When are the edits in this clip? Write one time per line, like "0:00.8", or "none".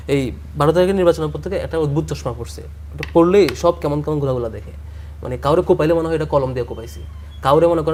none

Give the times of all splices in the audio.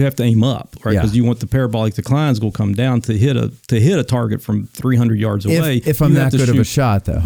none

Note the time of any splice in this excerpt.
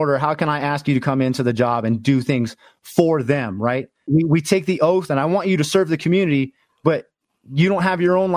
0:04.1

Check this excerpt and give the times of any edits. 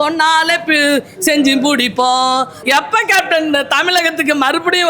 0:02.5

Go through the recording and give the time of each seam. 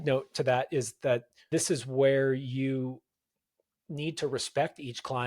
0:01.3

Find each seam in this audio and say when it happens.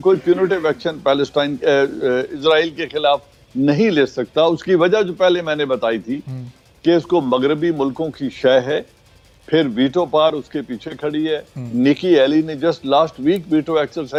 none

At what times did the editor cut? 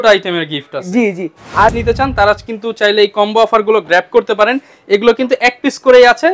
0:01.7

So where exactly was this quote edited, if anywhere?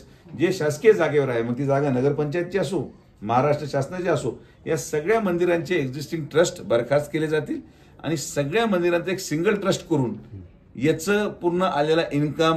none

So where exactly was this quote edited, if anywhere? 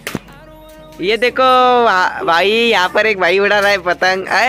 none

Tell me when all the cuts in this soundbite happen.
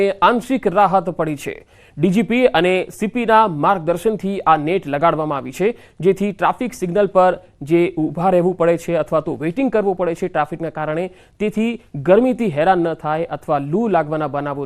0:09.8

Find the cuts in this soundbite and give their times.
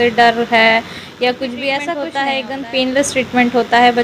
0:02.4

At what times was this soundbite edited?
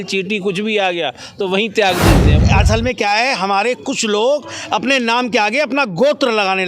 0:02.4

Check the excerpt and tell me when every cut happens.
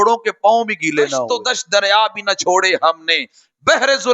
0:01.3

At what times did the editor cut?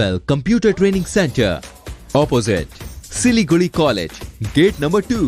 none

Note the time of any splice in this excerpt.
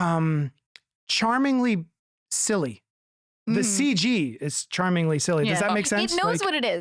none

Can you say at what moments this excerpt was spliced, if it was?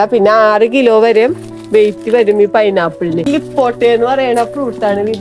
0:03.3

